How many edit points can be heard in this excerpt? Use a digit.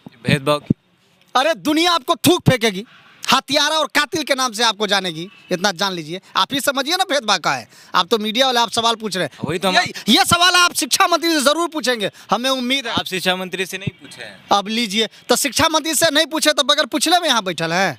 0